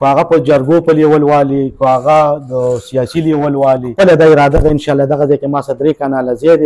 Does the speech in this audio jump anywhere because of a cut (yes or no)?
yes